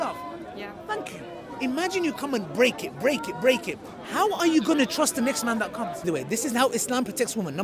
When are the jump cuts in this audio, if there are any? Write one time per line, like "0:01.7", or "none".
0:06.0